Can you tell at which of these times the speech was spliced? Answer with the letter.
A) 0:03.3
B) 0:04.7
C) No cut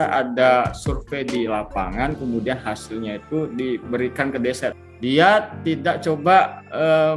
B